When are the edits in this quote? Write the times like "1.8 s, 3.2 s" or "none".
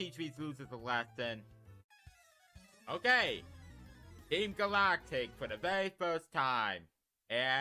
none

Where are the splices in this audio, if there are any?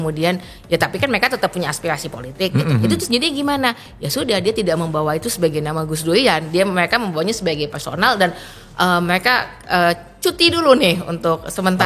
none

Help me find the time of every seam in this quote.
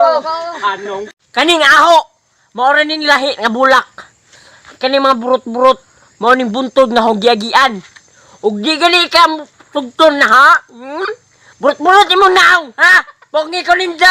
1.2 s

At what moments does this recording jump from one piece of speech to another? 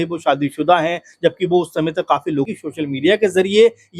2.5 s

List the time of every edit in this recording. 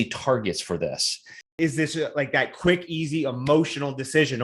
1.5 s

